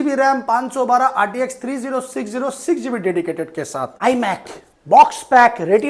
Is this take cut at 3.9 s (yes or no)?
yes